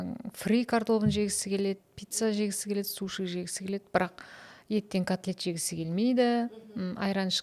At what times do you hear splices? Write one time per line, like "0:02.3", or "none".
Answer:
none